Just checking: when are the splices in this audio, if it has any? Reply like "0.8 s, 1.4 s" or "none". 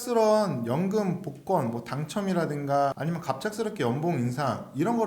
3.0 s